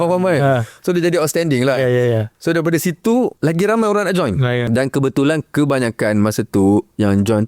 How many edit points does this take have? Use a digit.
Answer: 2